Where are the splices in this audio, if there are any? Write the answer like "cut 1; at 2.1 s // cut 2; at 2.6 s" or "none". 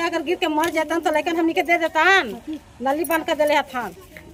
none

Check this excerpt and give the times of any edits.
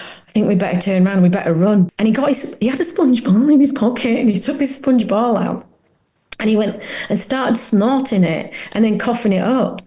cut 1; at 1.9 s

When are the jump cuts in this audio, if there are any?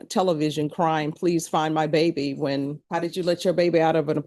cut 1; at 2.8 s

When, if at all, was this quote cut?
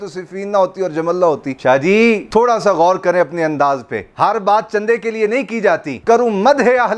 cut 1; at 4.1 s

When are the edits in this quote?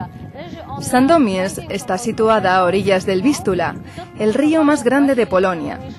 cut 1; at 0.9 s

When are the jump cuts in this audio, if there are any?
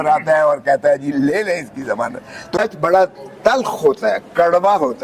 cut 1; at 2.6 s

